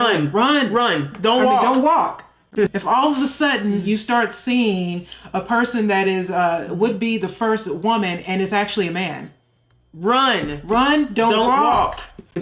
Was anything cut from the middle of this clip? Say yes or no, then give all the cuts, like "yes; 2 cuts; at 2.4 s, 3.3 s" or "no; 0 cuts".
yes; 1 cut; at 2.7 s